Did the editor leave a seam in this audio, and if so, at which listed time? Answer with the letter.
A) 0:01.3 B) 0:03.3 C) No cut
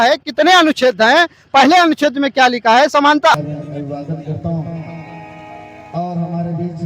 B